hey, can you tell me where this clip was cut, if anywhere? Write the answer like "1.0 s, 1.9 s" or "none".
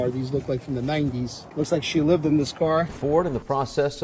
1.4 s, 2.9 s